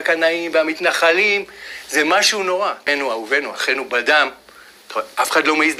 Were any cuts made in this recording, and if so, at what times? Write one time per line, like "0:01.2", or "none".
none